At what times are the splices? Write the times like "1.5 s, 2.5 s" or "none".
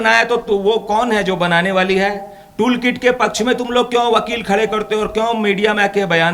none